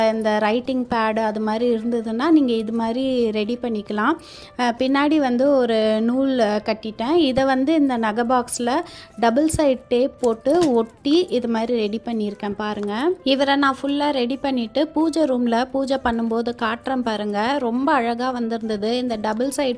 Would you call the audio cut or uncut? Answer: uncut